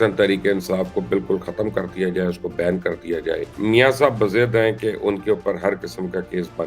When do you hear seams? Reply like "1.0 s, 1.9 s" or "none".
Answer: 3.5 s

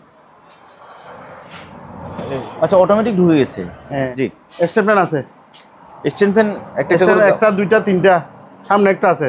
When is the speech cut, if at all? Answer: 4.1 s

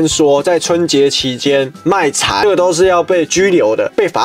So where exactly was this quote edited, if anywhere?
2.4 s

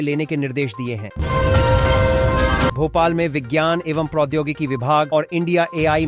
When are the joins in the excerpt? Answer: 1.1 s, 2.7 s

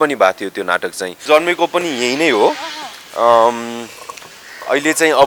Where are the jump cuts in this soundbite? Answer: 1.2 s

